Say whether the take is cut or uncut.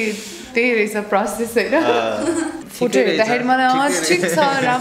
cut